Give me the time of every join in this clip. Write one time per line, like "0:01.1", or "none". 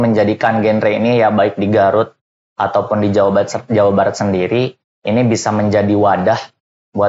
none